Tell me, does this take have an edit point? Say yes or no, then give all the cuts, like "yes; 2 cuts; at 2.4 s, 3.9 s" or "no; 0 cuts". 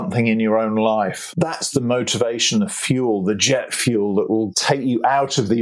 yes; 2 cuts; at 1.2 s, 4.6 s